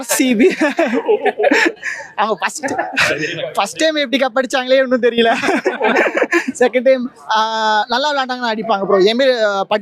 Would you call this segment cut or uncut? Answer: uncut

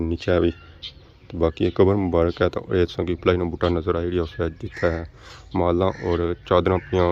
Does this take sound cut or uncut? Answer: uncut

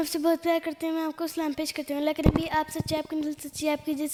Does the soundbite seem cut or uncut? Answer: uncut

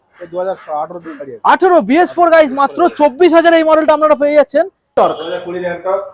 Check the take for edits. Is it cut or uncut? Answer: cut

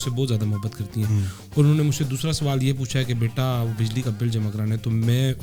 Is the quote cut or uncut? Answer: uncut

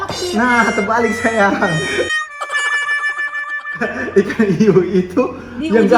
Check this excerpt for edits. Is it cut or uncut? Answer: uncut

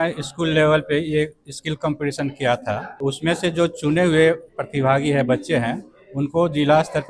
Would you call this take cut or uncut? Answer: uncut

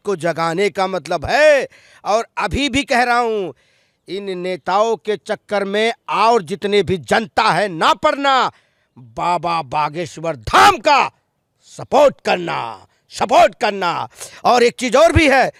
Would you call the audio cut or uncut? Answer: uncut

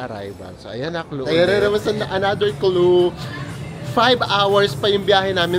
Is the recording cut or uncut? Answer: cut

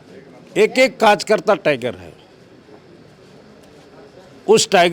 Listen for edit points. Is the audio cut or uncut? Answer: uncut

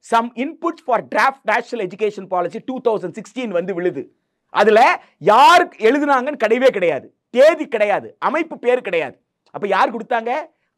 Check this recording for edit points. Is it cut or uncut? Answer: uncut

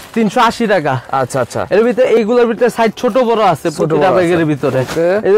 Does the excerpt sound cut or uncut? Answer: uncut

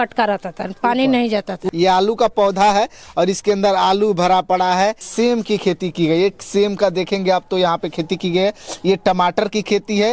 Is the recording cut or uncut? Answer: cut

